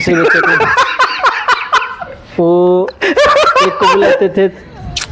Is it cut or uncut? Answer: uncut